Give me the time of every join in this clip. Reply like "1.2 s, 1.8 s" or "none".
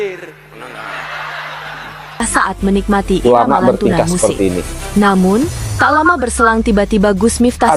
2.2 s